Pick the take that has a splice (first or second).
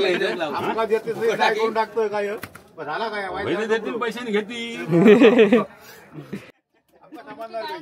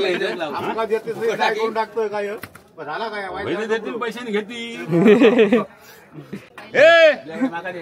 first